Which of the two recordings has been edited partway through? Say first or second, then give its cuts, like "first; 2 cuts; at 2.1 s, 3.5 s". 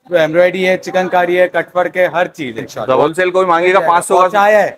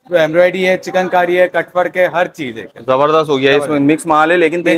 first; 1 cut; at 3.0 s